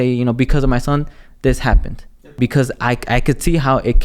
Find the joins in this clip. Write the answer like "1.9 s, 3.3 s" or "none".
2.3 s